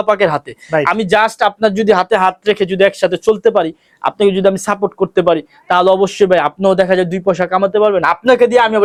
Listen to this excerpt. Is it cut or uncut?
uncut